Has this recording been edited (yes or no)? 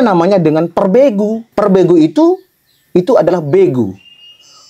yes